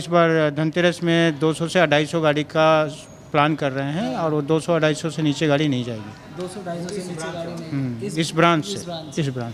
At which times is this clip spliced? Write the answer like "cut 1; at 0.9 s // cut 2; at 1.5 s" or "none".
none